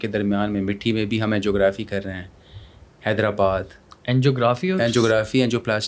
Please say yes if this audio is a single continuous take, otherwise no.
yes